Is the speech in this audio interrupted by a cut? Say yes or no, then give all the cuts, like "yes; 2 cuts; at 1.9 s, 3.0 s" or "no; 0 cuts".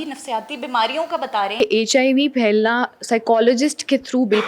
yes; 1 cut; at 1.5 s